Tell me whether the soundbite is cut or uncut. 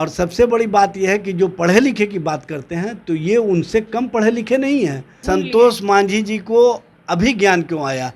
cut